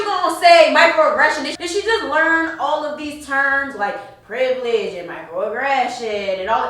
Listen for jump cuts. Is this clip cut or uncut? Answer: cut